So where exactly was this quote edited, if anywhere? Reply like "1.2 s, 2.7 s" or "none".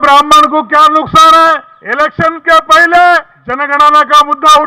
1.8 s, 3.7 s